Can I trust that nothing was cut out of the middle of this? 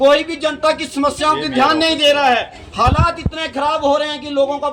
yes; 0 cuts

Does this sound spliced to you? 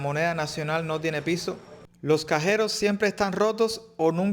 yes; 1 cut; at 1.7 s

